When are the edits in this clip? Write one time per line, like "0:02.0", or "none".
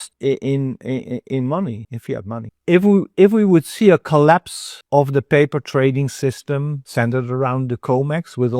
0:02.5